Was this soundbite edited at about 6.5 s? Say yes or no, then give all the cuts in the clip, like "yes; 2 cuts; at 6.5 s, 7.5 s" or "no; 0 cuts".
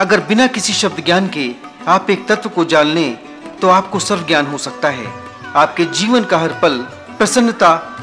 yes; 1 cut; at 6.5 s